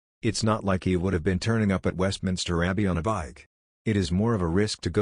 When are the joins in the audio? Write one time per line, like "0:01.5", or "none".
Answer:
0:03.9